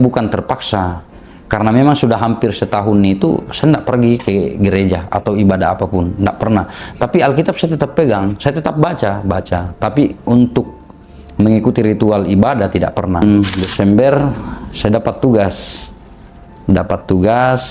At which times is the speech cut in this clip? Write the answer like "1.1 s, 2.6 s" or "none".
13.2 s